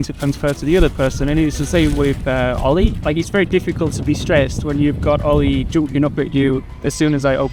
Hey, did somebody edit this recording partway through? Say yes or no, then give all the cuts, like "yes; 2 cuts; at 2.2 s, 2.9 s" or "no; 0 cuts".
no; 0 cuts